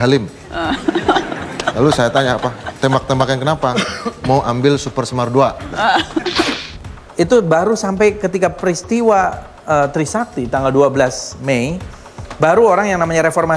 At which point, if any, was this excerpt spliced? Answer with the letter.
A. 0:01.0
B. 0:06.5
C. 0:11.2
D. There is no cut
B